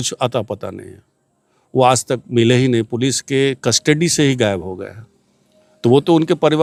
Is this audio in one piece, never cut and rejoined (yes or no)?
yes